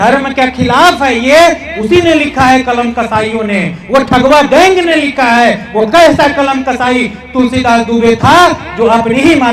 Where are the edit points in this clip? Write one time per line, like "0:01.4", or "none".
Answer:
none

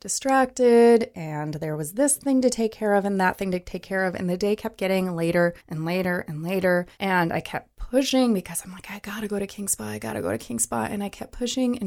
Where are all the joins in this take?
0:05.7
0:06.9

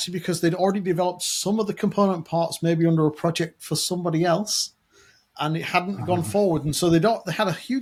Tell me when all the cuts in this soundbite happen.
none

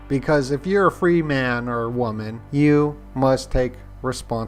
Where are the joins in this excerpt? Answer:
none

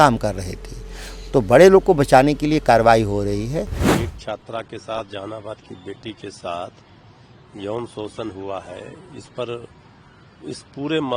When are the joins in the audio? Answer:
0:03.8

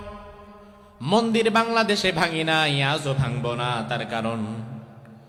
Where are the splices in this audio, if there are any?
none

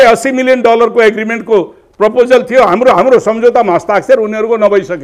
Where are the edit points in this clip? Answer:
none

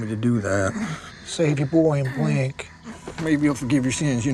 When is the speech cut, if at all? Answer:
0:03.0

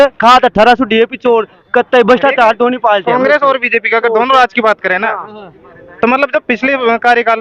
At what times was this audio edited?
none

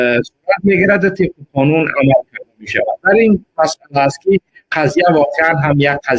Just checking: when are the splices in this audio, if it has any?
none

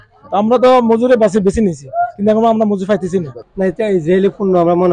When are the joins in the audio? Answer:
0:03.4

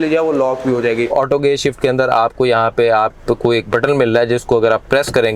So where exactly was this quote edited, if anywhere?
0:01.1

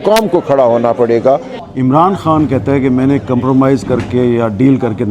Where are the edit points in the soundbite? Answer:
0:01.6

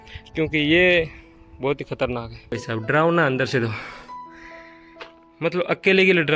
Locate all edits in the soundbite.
0:02.5

